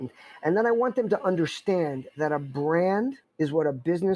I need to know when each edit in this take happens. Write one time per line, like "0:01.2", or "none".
0:03.2